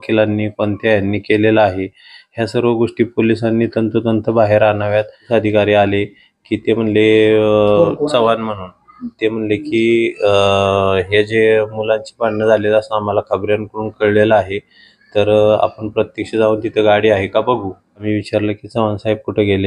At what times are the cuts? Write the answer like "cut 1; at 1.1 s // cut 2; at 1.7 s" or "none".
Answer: cut 1; at 5.3 s // cut 2; at 18.0 s